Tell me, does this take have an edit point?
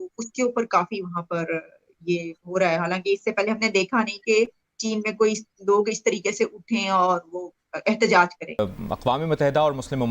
yes; 1 cut; at 8.6 s

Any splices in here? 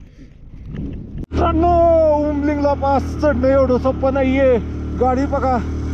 yes; 1 cut; at 1.2 s

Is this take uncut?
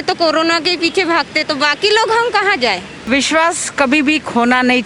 no; 1 cut; at 2.9 s

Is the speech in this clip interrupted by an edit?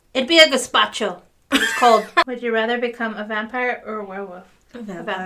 yes; 1 cut; at 2.2 s

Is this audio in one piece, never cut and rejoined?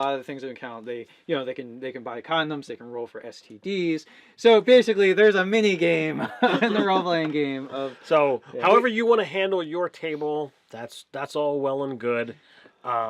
no; 1 cut; at 3.1 s

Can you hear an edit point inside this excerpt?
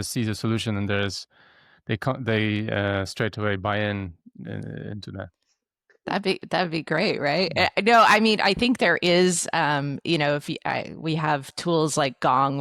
no; 0 cuts

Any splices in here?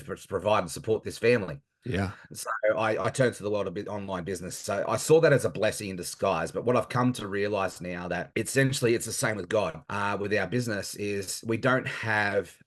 yes; 2 cuts; at 8.3 s, 9.8 s

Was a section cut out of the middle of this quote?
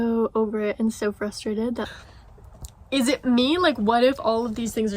yes; 1 cut; at 1.8 s

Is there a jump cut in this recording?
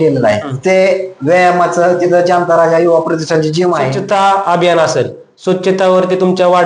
yes; 1 cut; at 3.9 s

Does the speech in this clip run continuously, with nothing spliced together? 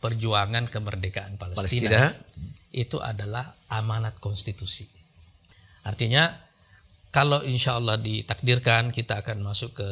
no; 1 cut; at 5.3 s

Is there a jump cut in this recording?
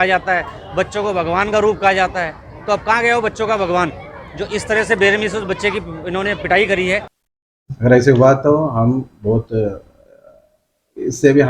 yes; 1 cut; at 7.2 s

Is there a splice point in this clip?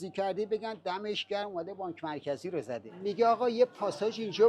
yes; 1 cut; at 2.9 s

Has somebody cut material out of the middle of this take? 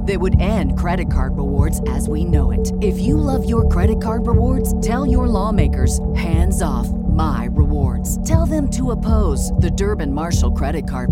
no; 0 cuts

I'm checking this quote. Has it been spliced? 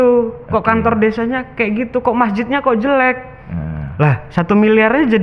no; 0 cuts

